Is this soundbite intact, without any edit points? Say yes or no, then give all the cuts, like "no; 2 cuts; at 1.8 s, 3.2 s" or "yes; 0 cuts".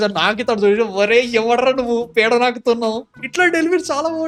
yes; 0 cuts